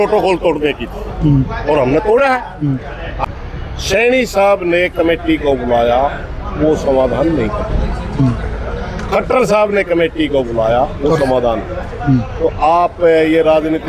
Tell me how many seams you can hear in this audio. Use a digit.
1